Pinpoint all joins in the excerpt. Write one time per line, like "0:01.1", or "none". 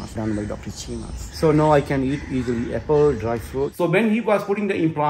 0:01.2
0:03.7